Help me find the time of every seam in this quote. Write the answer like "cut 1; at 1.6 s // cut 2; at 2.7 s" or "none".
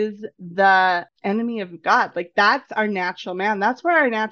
cut 1; at 1.1 s